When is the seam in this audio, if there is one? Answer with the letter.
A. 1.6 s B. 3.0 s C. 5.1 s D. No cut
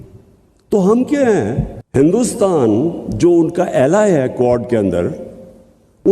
A